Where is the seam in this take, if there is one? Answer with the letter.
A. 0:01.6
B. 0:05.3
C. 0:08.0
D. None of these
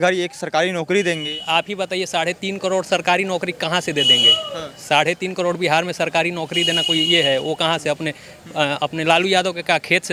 D